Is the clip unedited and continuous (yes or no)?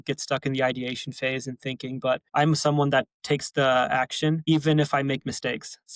no